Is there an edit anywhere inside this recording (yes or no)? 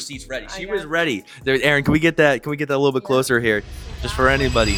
no